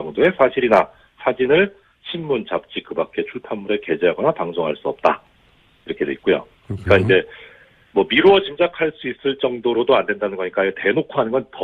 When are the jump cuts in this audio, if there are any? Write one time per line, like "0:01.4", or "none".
0:09.7